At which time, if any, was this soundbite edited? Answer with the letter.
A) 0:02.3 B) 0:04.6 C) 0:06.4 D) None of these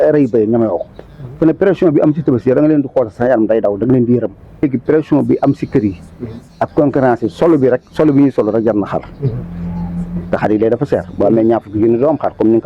B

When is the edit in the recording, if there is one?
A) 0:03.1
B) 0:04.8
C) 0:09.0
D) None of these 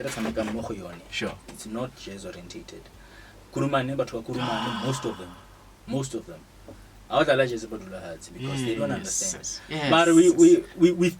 D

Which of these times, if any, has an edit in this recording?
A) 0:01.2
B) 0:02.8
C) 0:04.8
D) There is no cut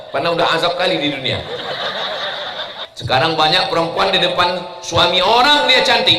B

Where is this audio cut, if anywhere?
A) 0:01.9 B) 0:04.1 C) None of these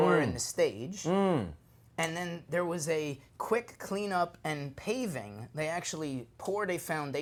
C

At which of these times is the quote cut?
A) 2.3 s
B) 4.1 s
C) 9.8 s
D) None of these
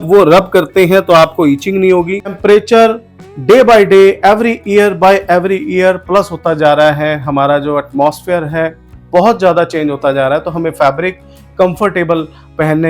A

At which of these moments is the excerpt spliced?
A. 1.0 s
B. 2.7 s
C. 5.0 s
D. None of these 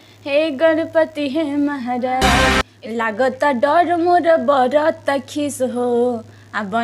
B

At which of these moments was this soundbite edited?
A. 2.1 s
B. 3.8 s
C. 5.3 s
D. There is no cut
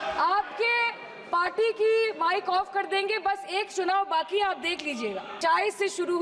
C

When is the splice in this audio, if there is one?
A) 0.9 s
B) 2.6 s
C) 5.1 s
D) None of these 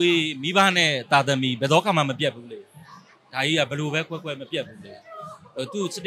D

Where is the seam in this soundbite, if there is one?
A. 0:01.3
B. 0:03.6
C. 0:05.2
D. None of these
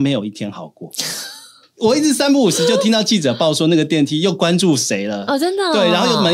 D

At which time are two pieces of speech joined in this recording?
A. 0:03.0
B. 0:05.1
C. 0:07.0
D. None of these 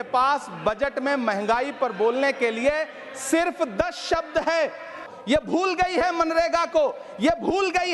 B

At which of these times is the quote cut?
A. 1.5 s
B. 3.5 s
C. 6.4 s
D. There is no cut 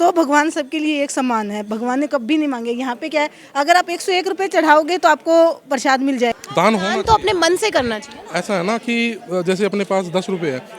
C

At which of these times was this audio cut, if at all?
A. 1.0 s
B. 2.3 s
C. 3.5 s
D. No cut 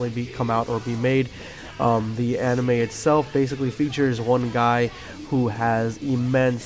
B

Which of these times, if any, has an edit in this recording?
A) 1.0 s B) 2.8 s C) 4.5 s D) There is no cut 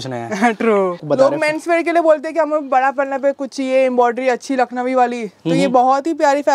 A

